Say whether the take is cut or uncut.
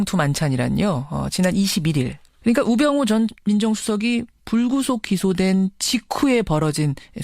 cut